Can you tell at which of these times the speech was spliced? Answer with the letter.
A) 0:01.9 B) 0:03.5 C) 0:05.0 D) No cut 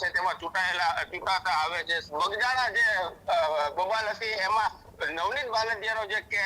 A